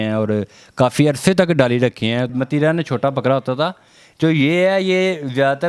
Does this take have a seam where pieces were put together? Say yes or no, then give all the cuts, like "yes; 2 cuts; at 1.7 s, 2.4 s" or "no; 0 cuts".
yes; 1 cut; at 2.3 s